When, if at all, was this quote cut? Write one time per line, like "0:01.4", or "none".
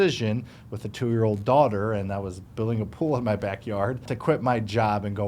0:04.1